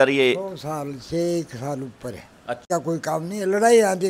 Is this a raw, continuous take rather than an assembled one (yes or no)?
no